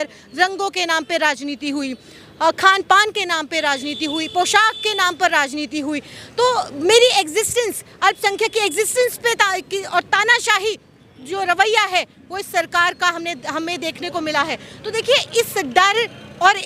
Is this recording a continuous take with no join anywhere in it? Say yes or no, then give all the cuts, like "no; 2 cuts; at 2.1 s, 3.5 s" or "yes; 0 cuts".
yes; 0 cuts